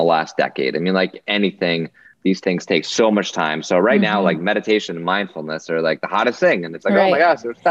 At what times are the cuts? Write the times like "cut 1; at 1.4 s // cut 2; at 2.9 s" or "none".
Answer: cut 1; at 2.4 s